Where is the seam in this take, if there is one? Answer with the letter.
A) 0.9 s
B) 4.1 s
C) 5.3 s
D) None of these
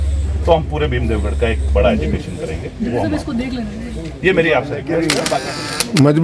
C